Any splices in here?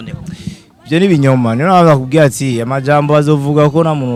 no; 0 cuts

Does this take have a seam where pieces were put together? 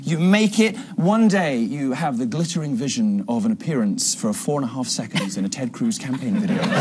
yes; 1 cut; at 4.1 s

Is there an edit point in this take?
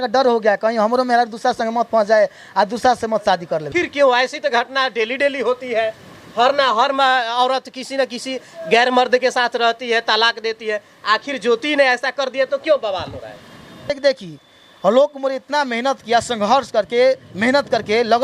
yes; 2 cuts; at 3.7 s, 13.9 s

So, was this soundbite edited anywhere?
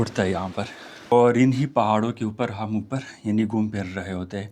yes; 1 cut; at 1.1 s

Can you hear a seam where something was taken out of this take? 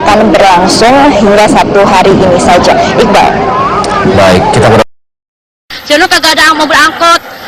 yes; 1 cut; at 1.6 s

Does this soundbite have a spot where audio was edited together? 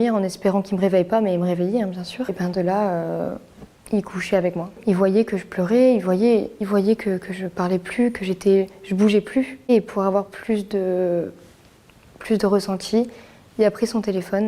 yes; 3 cuts; at 2.3 s, 4.7 s, 9.7 s

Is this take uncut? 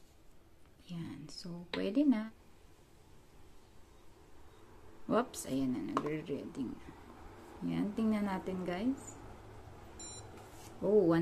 no; 1 cut; at 2.5 s

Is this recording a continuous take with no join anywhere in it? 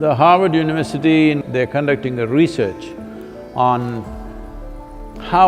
no; 1 cut; at 1.4 s

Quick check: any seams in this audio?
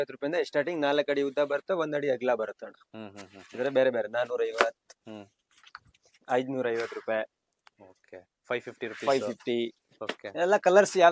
no; 0 cuts

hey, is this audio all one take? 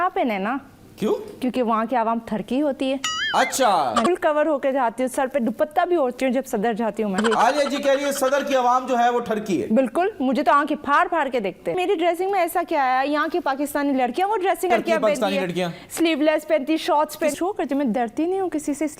no; 5 cuts; at 4.1 s, 7.2 s, 11.8 s, 14.7 s, 17.3 s

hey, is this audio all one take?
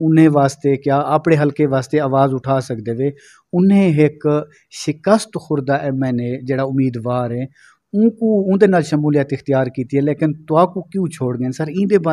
yes; 0 cuts

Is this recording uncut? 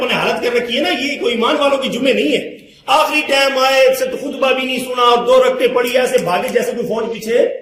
yes; 0 cuts

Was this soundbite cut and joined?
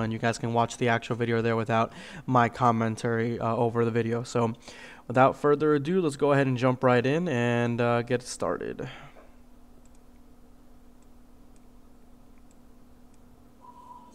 no; 0 cuts

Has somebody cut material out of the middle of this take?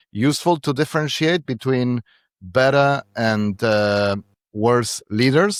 no; 0 cuts

